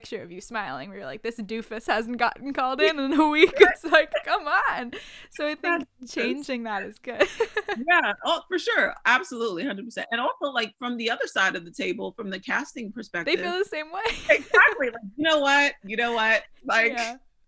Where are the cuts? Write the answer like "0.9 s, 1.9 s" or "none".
none